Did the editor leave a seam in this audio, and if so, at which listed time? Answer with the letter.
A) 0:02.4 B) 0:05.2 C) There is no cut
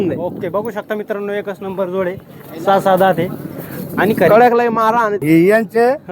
B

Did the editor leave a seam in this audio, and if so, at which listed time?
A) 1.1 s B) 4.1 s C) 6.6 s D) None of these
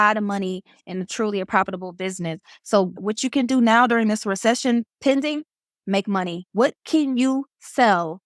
D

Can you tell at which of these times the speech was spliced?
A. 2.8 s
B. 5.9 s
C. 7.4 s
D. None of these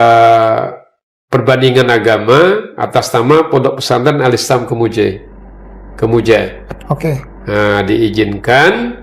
D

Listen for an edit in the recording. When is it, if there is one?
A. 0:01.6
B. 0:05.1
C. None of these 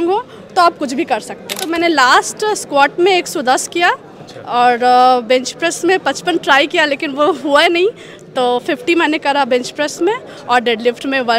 A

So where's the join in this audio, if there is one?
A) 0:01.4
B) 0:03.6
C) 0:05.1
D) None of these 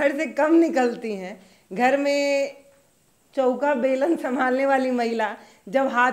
D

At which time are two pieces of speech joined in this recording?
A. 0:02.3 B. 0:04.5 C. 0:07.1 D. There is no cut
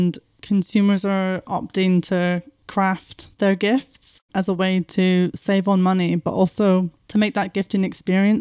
D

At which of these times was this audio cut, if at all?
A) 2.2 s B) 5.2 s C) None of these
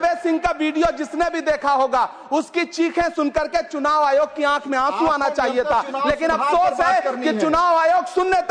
C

